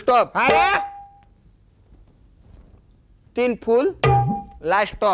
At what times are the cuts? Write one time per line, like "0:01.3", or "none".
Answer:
none